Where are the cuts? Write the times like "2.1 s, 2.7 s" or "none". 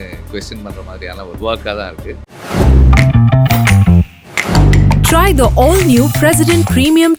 none

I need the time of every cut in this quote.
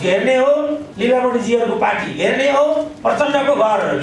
0.9 s, 2.9 s

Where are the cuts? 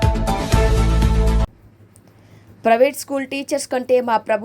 1.5 s

